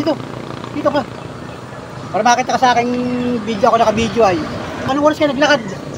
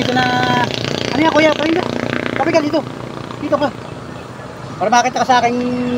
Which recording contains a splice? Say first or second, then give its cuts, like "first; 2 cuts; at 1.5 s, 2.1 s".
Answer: first; 1 cut; at 4.9 s